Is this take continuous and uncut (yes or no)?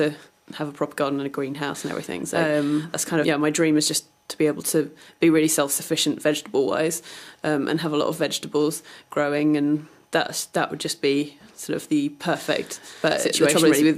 yes